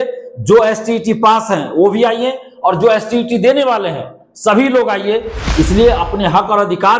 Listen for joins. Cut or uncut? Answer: cut